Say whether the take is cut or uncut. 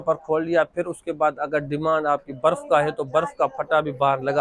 uncut